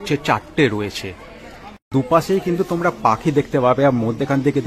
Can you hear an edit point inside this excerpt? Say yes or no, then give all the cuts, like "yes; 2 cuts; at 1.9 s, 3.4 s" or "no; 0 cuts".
yes; 1 cut; at 1.8 s